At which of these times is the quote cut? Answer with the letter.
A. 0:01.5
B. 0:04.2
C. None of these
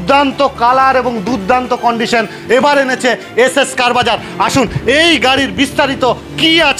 C